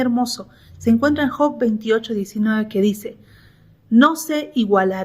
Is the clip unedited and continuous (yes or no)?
yes